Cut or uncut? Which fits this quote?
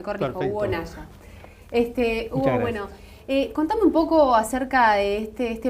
uncut